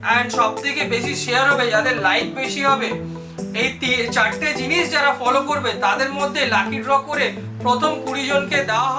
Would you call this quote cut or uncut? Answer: uncut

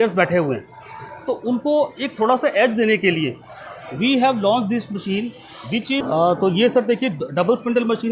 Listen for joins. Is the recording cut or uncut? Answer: cut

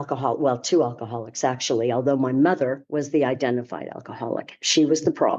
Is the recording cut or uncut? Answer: uncut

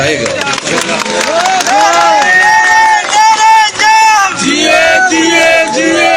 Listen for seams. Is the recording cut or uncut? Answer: uncut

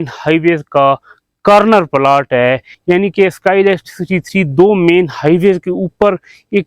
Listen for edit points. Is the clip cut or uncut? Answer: cut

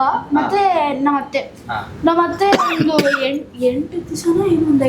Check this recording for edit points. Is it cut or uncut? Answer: uncut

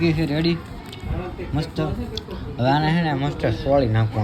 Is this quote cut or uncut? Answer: uncut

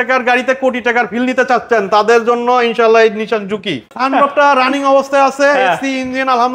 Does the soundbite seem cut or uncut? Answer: cut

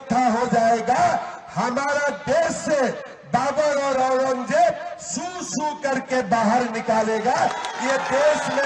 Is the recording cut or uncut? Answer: uncut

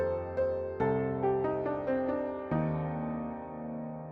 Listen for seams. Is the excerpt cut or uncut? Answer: cut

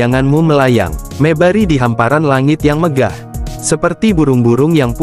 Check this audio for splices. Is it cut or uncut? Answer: uncut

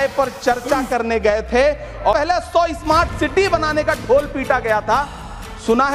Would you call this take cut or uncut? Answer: cut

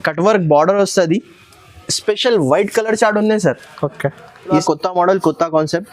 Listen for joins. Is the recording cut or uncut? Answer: cut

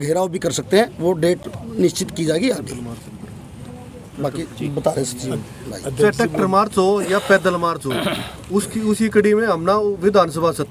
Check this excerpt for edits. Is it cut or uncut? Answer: uncut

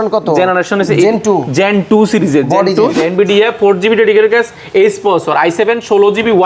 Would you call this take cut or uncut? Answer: cut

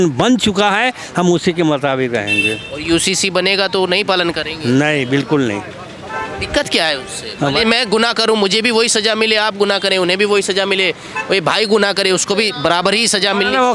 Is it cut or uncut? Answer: uncut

